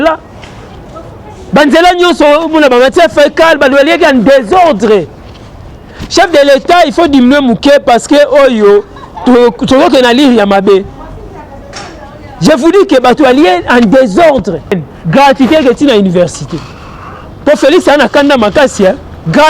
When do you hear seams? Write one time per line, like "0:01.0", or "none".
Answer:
0:14.8